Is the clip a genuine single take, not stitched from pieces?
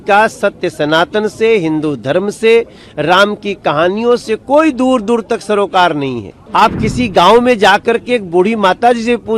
no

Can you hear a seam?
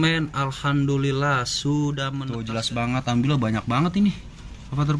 yes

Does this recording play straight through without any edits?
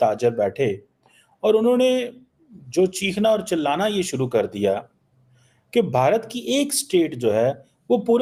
yes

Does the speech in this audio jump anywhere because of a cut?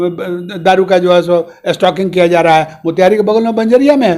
no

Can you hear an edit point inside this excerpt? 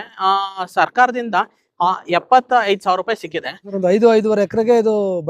yes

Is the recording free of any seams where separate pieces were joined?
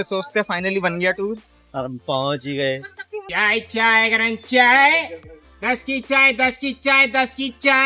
no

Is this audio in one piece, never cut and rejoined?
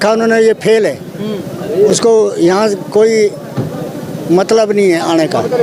yes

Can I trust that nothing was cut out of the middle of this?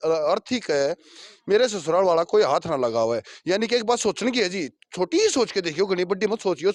yes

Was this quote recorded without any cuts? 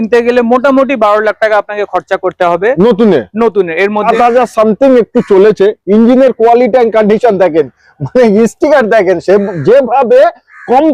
no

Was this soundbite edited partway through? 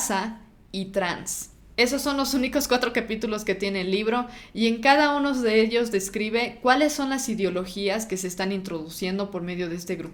no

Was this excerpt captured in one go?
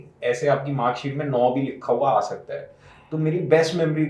yes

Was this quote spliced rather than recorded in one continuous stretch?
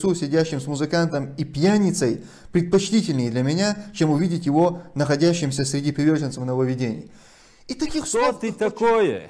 yes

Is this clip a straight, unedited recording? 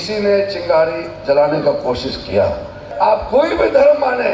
no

